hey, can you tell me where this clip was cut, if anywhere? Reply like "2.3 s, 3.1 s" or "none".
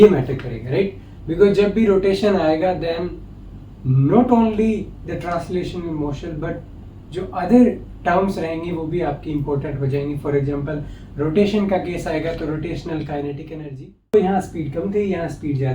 14.1 s